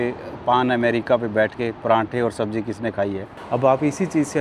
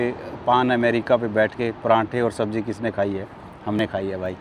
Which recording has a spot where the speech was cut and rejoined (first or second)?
first